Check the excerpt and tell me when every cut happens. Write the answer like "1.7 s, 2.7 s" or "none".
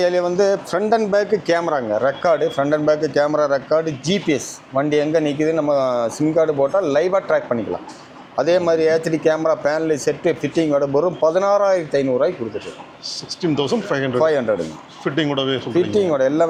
none